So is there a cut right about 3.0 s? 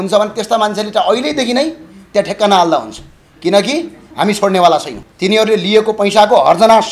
no; 1 cut; at 5.0 s

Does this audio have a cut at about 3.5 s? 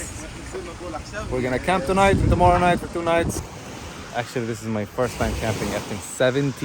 yes; 1 cut; at 3.5 s

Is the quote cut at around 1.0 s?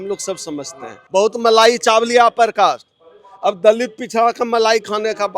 yes; 1 cut; at 1.0 s

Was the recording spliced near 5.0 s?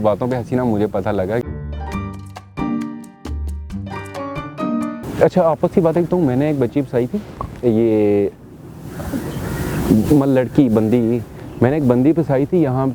no; 0 cuts

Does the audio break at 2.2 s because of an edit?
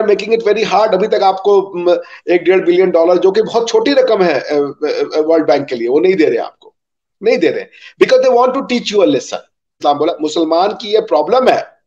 no; 1 cut; at 9.8 s

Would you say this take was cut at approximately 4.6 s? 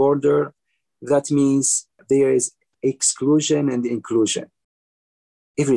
no; 1 cut; at 2.0 s

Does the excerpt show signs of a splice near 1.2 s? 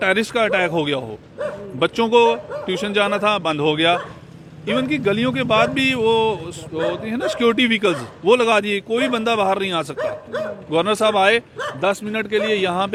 no; 0 cuts

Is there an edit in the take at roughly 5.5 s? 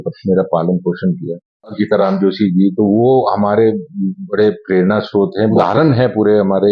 yes; 2 cuts; at 1.8 s, 5.5 s

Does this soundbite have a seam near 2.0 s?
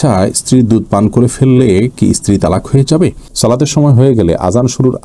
no; 1 cut; at 3.2 s

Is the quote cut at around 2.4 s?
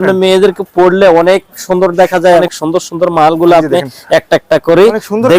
yes; 1 cut; at 2.4 s

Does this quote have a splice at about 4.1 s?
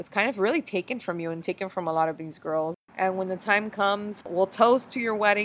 yes; 2 cuts; at 2.8 s, 4.1 s

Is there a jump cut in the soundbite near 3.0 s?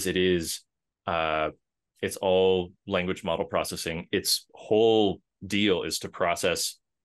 no; 0 cuts

